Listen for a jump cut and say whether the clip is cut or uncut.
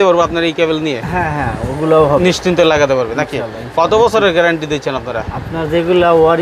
uncut